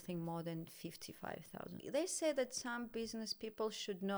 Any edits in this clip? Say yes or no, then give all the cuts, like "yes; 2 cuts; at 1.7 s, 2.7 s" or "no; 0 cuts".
yes; 1 cut; at 1.8 s